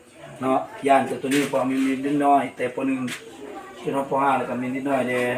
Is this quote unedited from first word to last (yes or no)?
yes